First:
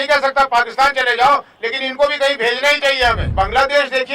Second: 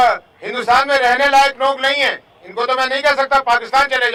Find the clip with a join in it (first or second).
first